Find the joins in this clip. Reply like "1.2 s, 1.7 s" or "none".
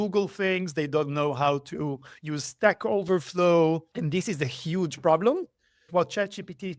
3.9 s, 5.9 s

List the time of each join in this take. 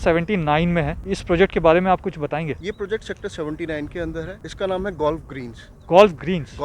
1.0 s, 2.6 s, 4.4 s

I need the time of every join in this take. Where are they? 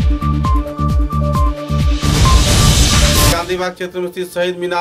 3.3 s

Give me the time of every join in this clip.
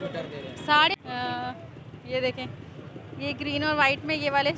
1.0 s

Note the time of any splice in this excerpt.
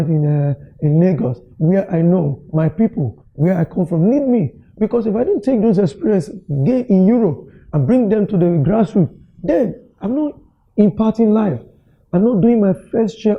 none

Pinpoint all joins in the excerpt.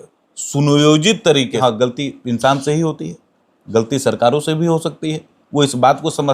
1.5 s

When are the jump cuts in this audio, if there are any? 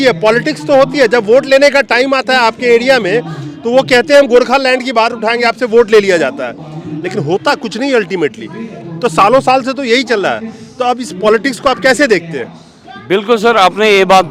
none

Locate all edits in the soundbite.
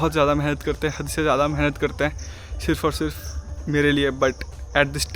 none

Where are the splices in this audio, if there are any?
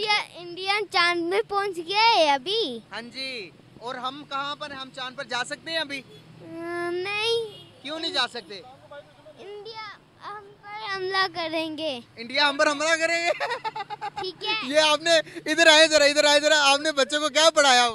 none

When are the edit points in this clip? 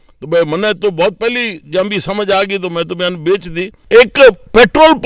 3.7 s

